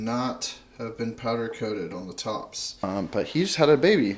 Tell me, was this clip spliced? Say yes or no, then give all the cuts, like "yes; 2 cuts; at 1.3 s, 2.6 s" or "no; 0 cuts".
yes; 1 cut; at 2.9 s